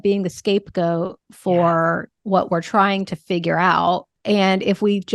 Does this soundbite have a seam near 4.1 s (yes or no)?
yes